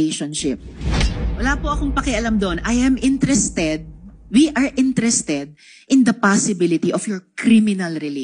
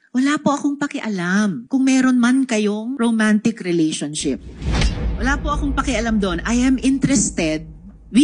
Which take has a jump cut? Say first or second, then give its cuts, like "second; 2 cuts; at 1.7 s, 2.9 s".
second; 2 cuts; at 1.6 s, 2.9 s